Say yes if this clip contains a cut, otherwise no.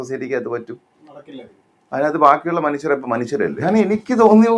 yes